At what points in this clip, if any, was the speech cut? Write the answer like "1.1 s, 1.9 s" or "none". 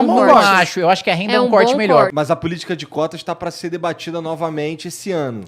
2.1 s